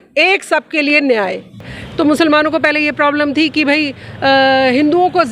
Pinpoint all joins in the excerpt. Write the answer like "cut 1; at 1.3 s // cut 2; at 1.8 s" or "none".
cut 1; at 1.8 s